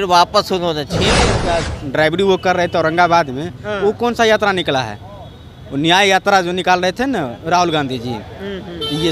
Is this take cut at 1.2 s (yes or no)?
yes